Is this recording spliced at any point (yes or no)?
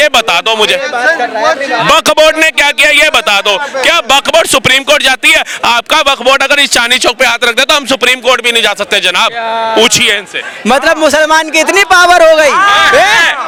no